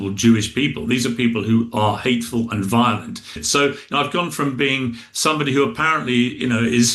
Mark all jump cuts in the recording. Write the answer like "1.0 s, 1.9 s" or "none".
3.3 s